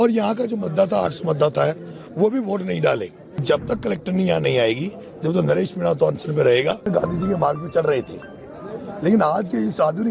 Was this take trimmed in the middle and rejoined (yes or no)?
yes